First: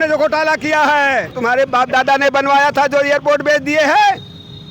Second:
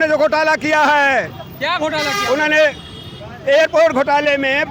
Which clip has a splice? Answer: first; 1 cut; at 1.3 s

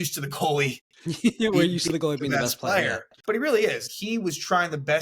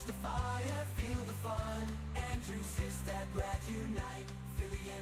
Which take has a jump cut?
first; 2 cuts; at 3.1 s, 3.9 s

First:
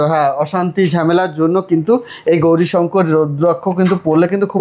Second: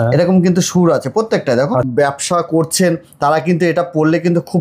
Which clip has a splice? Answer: second; 1 cut; at 1.9 s

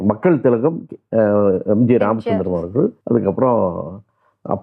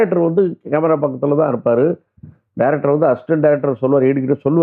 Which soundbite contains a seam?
first; 1 cut; at 3.0 s

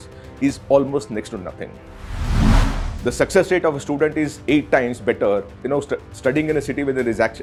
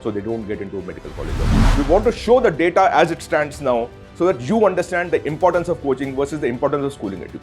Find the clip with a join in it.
second; 1 cut; at 1.6 s

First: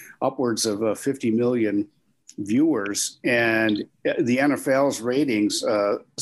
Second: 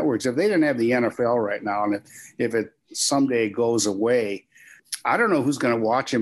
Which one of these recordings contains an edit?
second; 1 cut; at 4.8 s

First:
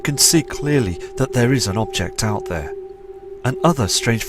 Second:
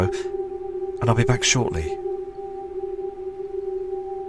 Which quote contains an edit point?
first; 1 cut; at 1.0 s

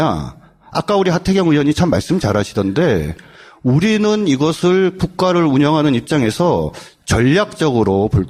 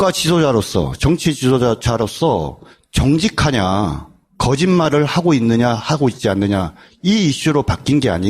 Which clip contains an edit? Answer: second; 1 cut; at 5.5 s

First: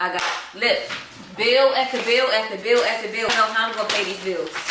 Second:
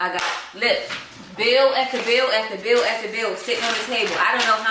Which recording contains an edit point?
first; 1 cut; at 3.3 s

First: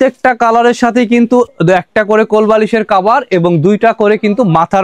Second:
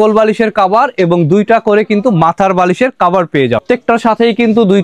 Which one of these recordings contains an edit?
second; 1 cut; at 3.6 s

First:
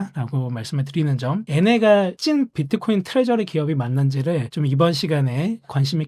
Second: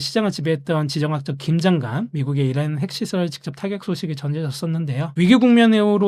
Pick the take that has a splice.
first; 2 cuts; at 1.5 s, 4.5 s

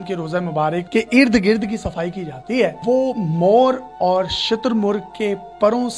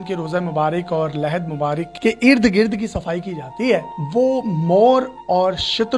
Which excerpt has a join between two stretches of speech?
first; 2 cuts; at 0.9 s, 2.8 s

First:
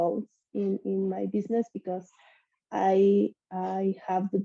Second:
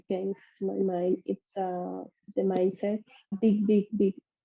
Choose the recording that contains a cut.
second; 1 cut; at 3.4 s

